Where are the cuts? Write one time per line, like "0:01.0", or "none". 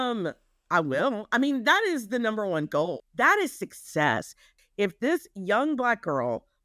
0:03.0
0:04.5